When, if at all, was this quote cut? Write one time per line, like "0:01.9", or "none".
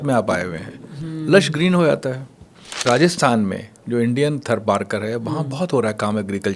0:02.9